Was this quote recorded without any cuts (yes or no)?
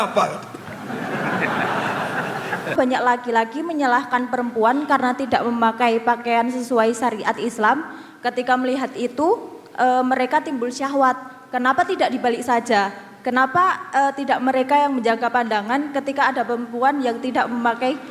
no